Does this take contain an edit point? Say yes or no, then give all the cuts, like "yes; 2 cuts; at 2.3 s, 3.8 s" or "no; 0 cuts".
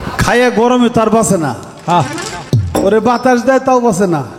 no; 0 cuts